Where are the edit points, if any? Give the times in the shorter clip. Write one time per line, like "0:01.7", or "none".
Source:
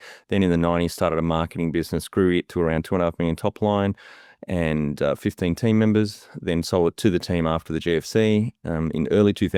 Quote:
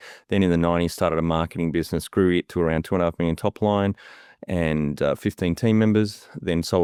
none